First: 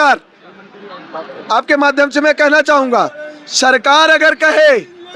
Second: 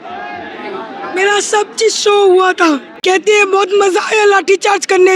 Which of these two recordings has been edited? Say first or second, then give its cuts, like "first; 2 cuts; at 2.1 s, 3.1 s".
second; 1 cut; at 2.9 s